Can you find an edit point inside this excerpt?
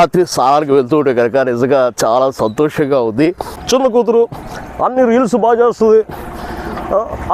yes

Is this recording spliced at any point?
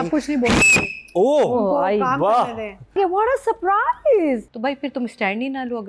yes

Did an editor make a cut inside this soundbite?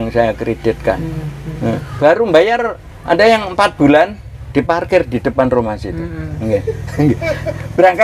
no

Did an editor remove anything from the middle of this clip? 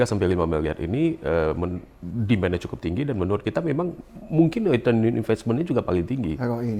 no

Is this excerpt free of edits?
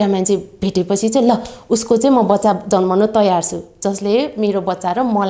yes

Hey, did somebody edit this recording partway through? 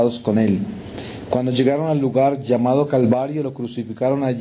yes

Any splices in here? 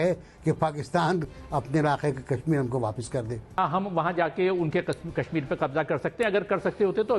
yes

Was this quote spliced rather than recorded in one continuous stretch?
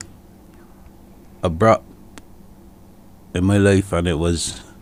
no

